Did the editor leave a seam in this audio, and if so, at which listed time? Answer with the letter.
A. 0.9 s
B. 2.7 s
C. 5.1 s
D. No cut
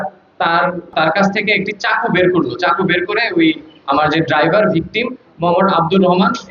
A